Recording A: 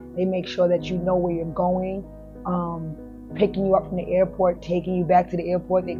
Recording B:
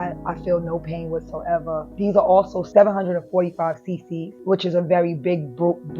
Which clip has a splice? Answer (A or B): B